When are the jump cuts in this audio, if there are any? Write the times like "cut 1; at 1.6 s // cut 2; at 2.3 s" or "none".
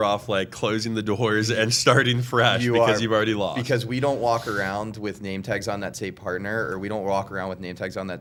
none